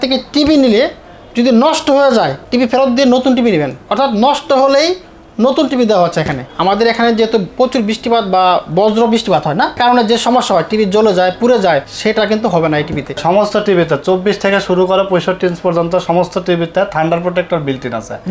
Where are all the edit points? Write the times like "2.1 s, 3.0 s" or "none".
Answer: 2.4 s, 6.5 s, 9.8 s, 11.9 s, 13.2 s